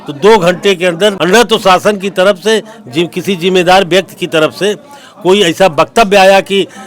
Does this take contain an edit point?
yes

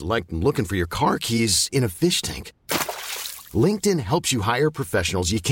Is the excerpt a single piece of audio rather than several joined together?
yes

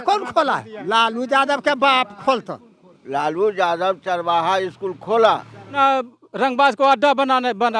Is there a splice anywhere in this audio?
no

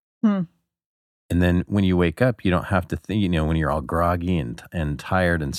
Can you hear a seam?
no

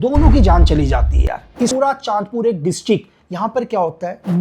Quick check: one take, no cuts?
no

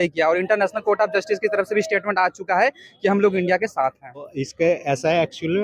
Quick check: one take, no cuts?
no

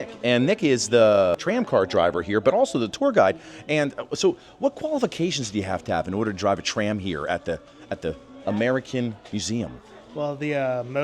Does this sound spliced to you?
yes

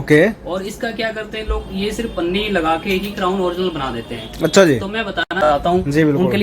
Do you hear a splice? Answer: yes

